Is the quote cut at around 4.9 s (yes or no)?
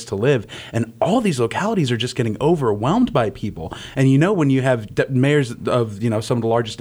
no